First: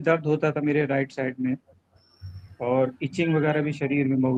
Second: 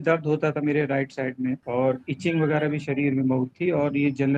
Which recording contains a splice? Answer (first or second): second